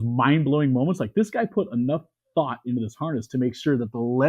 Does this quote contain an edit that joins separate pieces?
no; 0 cuts

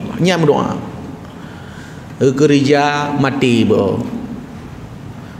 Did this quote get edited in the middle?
no; 0 cuts

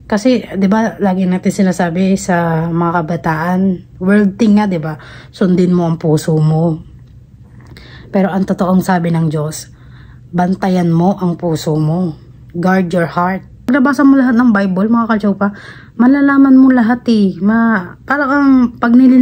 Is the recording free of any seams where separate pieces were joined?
no; 1 cut; at 13.6 s

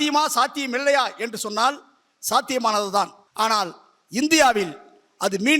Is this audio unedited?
no; 1 cut; at 3.2 s

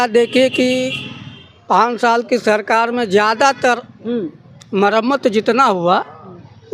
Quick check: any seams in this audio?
no; 0 cuts

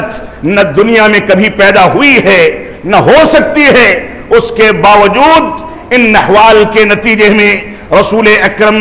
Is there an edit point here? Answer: no; 0 cuts

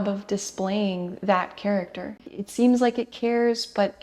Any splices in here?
yes; 1 cut; at 2.3 s

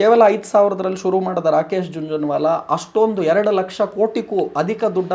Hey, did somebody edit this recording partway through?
no; 0 cuts

